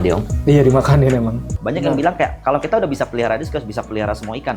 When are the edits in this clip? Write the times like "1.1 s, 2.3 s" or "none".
1.6 s